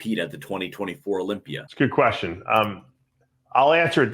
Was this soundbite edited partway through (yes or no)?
yes